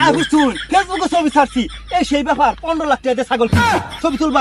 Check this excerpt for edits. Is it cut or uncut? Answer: uncut